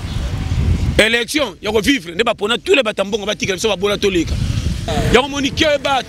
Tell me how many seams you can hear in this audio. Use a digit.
1